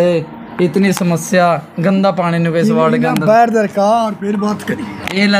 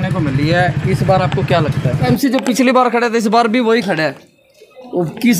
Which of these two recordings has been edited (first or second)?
second